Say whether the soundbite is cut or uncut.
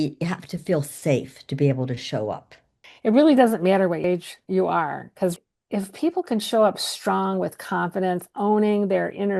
uncut